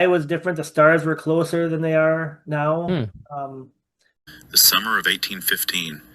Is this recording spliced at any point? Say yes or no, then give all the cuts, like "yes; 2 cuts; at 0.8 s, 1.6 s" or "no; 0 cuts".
yes; 1 cut; at 4.1 s